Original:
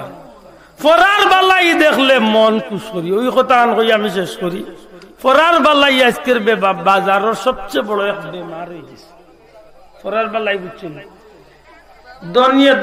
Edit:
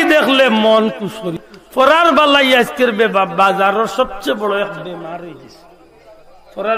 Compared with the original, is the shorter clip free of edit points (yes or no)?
no